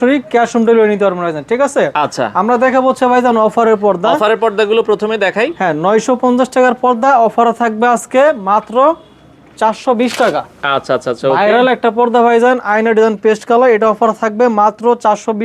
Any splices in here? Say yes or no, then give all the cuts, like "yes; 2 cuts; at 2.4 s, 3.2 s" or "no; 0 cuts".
no; 0 cuts